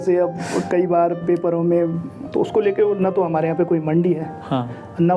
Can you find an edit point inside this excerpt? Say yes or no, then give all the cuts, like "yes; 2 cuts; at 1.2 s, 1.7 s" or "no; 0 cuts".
yes; 1 cut; at 2.2 s